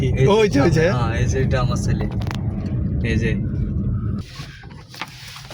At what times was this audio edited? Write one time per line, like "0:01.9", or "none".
0:04.2